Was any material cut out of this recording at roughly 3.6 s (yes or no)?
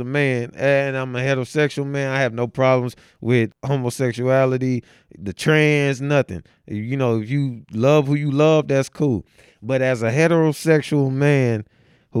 yes